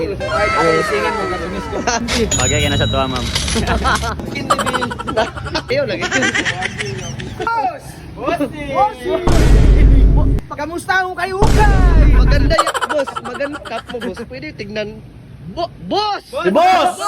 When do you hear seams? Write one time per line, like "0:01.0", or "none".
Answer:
0:02.0
0:04.2
0:05.7
0:07.5